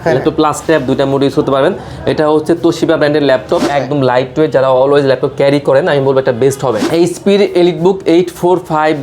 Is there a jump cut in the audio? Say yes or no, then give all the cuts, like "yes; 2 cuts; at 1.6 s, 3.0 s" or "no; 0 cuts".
yes; 2 cuts; at 3.7 s, 6.8 s